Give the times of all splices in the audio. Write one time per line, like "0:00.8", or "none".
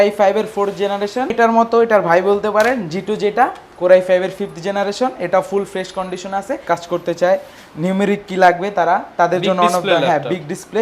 0:01.3
0:06.6